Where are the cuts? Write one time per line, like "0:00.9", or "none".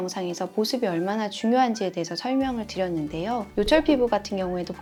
none